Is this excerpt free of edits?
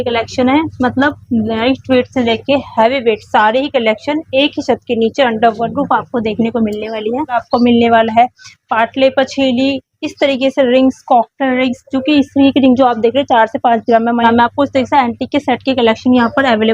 no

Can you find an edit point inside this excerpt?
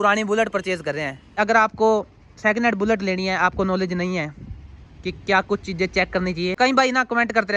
yes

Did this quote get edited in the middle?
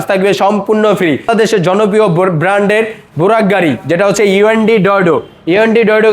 yes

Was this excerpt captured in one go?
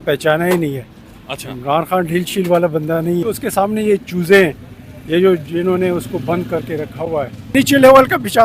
no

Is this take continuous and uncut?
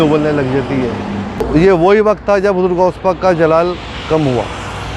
no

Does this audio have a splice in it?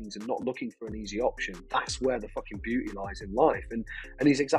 no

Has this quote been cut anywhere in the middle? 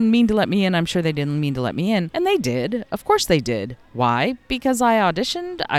yes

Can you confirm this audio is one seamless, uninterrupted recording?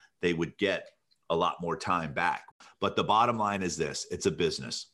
no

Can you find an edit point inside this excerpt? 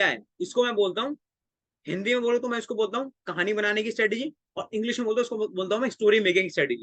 no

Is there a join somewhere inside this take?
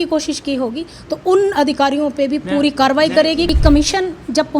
yes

